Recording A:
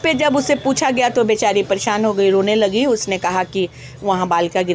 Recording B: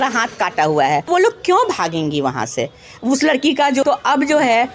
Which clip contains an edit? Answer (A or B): B